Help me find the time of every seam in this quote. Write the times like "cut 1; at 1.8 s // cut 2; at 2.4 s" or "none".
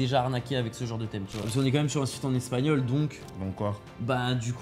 cut 1; at 1.5 s